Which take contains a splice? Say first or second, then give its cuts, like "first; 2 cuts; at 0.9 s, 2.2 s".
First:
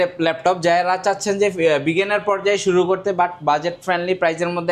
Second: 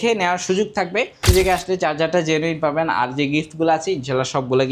second; 1 cut; at 1.2 s